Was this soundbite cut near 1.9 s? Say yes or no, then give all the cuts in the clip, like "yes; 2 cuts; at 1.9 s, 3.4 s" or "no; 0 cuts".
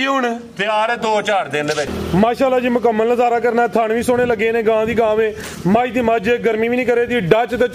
yes; 1 cut; at 1.9 s